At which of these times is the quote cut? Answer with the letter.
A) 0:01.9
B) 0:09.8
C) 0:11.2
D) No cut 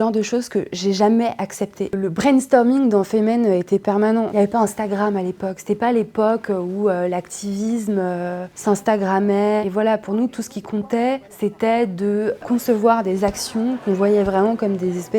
A